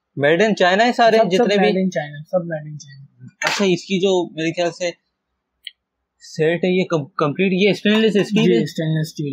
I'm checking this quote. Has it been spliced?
no; 0 cuts

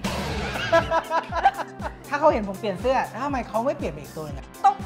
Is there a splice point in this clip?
yes; 1 cut; at 2.0 s

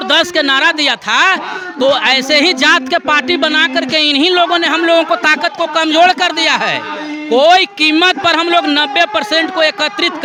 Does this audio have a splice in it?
no; 0 cuts

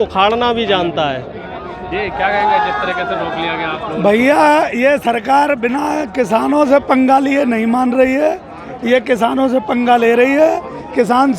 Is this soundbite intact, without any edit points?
yes; 0 cuts

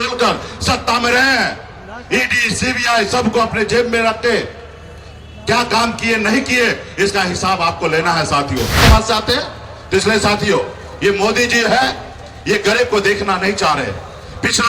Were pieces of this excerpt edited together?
yes; 1 cut; at 8.8 s

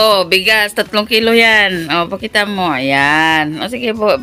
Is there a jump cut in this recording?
no; 0 cuts

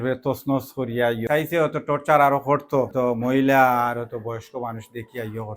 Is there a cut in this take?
yes; 2 cuts; at 1.2 s, 2.9 s

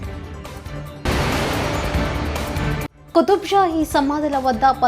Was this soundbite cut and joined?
yes; 2 cuts; at 1.0 s, 3.0 s

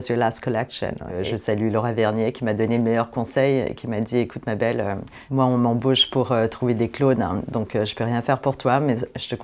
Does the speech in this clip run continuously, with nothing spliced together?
no; 2 cuts; at 1.1 s, 5.1 s

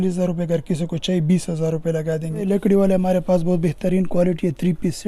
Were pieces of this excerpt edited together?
yes; 1 cut; at 2.5 s

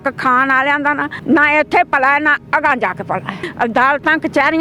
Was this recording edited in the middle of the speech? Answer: yes; 2 cuts; at 1.1 s, 3.4 s

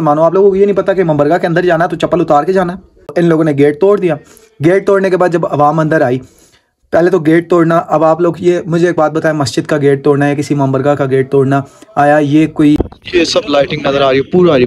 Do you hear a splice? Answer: yes; 2 cuts; at 3.1 s, 12.8 s

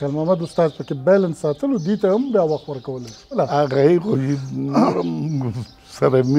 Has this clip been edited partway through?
no; 0 cuts

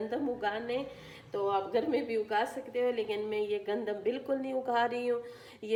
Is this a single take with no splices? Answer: yes; 0 cuts

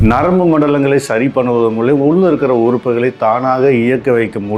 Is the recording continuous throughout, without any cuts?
yes; 0 cuts

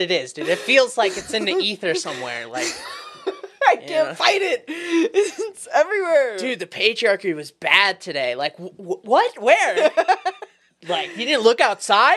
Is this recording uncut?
yes; 0 cuts

